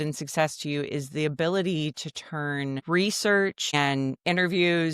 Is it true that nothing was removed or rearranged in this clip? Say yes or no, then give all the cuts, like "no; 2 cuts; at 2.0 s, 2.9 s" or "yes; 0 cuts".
no; 2 cuts; at 2.8 s, 3.7 s